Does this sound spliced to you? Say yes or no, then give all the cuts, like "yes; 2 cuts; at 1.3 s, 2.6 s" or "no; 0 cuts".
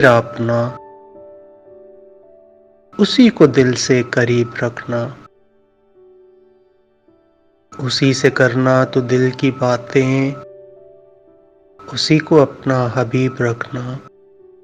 yes; 2 cuts; at 1.2 s, 2.9 s